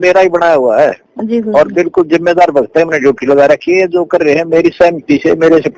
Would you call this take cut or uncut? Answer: uncut